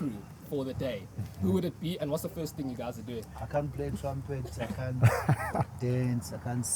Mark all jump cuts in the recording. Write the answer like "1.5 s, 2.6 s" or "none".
3.3 s